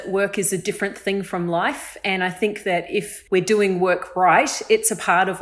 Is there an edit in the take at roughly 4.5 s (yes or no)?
no